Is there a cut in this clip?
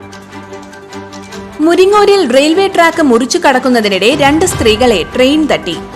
yes; 1 cut; at 1.2 s

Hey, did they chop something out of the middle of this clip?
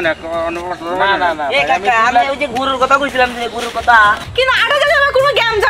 yes; 1 cut; at 4.2 s

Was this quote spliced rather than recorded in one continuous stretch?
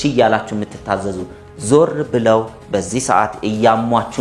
no; 0 cuts

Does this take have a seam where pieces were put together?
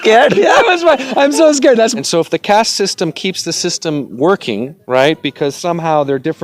yes; 1 cut; at 1.9 s

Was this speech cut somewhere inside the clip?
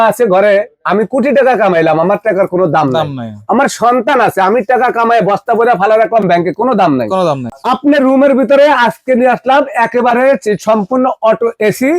yes; 1 cut; at 7.5 s

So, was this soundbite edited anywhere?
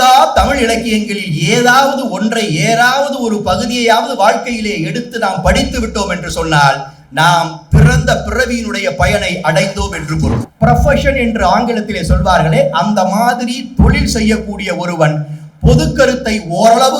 yes; 1 cut; at 10.5 s

